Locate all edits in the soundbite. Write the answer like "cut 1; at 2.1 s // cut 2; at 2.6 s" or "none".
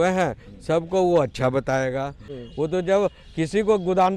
cut 1; at 2.3 s